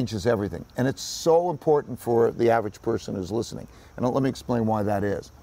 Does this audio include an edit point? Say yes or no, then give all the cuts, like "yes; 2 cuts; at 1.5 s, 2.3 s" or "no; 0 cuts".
no; 0 cuts